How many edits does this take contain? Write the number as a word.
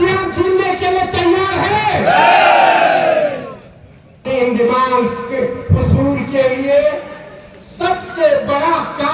one